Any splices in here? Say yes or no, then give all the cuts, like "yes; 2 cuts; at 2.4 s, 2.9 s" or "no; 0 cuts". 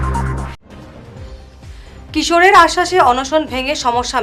no; 0 cuts